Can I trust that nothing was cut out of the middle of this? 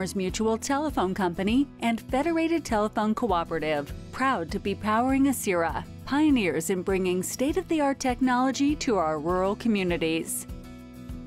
no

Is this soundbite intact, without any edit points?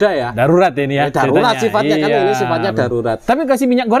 yes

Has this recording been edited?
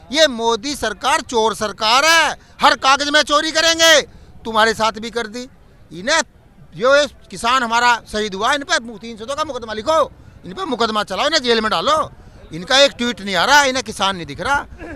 no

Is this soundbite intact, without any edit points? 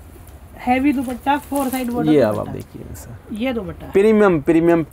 yes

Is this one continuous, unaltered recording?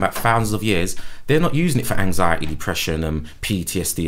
yes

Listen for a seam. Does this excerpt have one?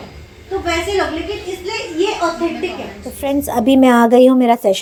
no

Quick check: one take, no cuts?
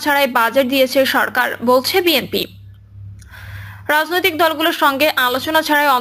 yes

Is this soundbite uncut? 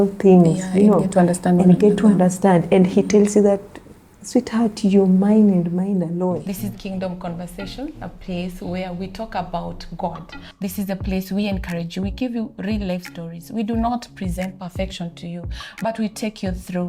no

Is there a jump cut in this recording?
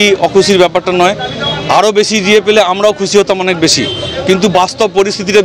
no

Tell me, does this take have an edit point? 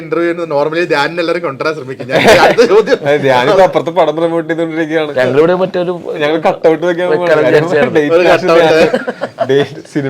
no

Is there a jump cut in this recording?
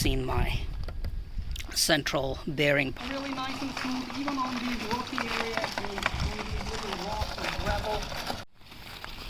yes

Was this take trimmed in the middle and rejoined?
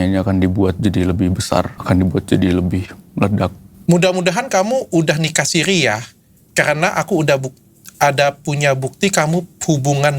yes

